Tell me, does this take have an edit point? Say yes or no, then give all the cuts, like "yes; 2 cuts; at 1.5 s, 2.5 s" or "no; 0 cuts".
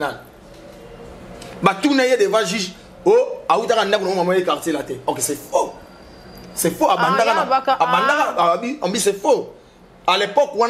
no; 0 cuts